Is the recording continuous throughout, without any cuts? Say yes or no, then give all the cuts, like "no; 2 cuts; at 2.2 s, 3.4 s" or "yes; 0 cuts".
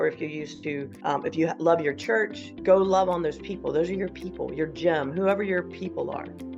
yes; 0 cuts